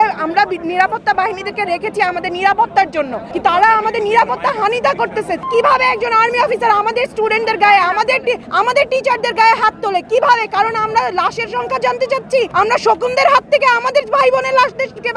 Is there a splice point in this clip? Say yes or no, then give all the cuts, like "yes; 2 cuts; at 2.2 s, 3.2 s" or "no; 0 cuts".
yes; 4 cuts; at 3.2 s, 5.5 s, 8.5 s, 12.5 s